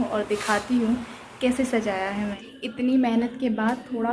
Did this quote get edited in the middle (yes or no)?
yes